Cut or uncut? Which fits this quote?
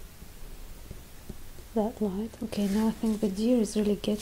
cut